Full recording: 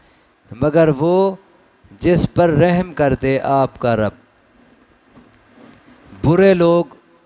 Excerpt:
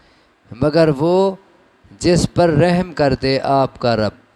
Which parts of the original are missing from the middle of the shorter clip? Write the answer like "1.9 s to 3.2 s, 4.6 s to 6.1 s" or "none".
none